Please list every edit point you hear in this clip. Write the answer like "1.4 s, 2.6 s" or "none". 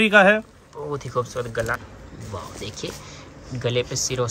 1.8 s